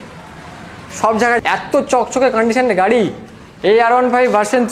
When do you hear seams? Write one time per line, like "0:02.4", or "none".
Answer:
0:01.4